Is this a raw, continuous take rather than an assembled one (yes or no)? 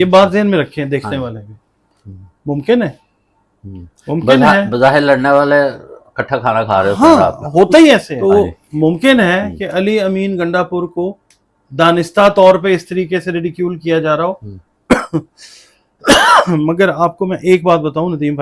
no